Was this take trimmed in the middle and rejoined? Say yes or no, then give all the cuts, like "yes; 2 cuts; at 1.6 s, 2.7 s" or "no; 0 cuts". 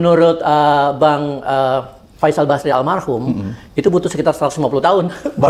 no; 0 cuts